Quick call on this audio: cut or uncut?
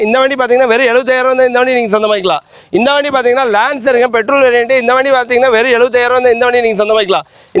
uncut